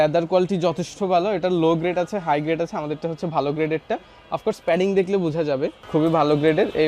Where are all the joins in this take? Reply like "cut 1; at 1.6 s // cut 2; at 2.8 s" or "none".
cut 1; at 5.8 s